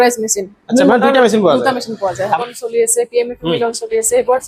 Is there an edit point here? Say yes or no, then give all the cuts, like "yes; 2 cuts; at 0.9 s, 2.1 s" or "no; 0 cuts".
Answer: yes; 1 cut; at 2.4 s